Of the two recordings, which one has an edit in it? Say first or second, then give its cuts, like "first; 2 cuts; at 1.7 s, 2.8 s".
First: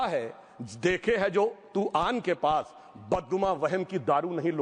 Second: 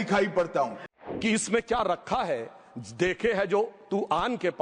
second; 1 cut; at 0.9 s